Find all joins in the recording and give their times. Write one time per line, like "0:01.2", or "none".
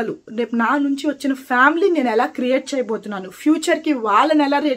none